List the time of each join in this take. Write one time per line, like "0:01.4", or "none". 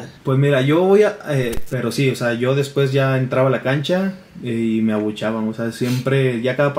0:01.6